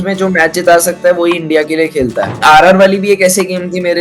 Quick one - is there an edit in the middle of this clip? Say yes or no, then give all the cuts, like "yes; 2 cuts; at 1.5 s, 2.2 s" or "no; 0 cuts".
yes; 1 cut; at 2.4 s